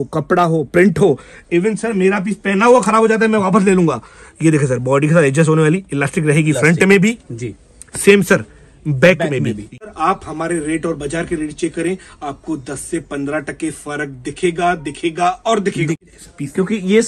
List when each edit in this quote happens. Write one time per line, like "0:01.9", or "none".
0:09.9
0:16.0